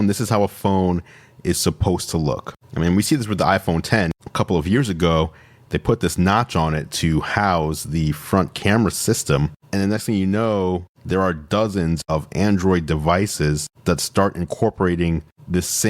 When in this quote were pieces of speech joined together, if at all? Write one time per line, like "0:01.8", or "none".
0:09.6
0:12.0